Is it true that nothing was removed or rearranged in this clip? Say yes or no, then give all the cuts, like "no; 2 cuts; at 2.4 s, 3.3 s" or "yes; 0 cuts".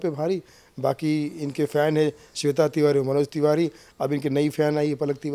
yes; 0 cuts